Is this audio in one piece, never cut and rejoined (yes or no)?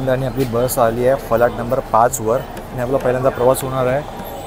yes